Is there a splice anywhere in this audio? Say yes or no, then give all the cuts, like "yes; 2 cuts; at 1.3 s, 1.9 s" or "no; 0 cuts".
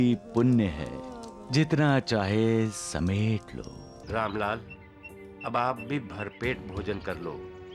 yes; 1 cut; at 3.9 s